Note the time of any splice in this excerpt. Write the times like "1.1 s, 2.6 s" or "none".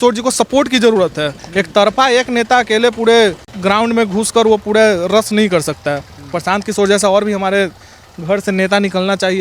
3.5 s